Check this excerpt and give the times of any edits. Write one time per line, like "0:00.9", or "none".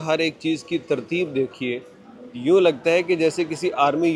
none